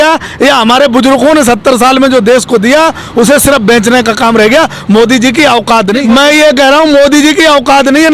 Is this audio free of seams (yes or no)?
no